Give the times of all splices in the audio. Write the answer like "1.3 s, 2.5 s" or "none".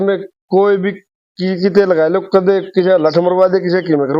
none

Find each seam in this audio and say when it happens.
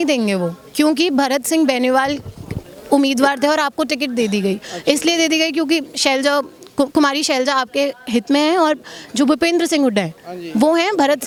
none

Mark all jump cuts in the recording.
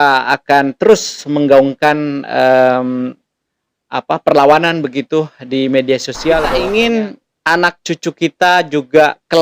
6.5 s

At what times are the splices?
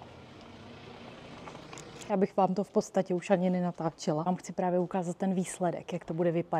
2.1 s, 4.3 s

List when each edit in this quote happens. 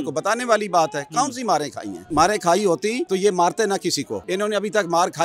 2.1 s, 3.0 s, 4.2 s

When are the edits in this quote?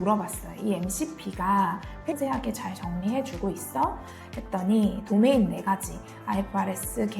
2.2 s

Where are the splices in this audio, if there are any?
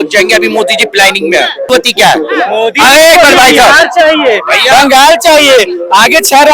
1.7 s

